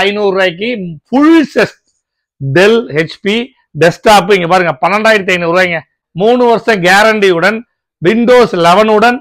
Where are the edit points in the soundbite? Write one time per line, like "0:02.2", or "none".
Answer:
0:06.0